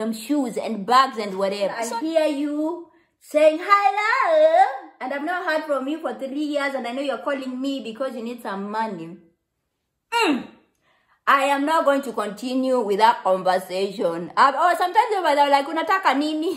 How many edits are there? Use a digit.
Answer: 1